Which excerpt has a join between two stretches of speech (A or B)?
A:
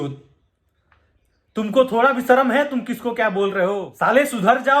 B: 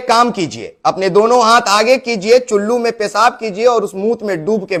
A